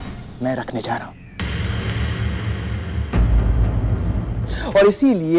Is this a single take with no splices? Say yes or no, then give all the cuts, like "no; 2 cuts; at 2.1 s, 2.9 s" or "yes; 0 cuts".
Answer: no; 1 cut; at 4.5 s